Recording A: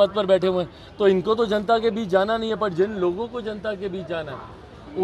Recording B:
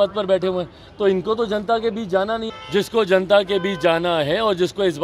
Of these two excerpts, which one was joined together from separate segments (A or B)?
B